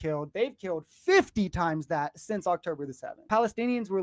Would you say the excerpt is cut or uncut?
cut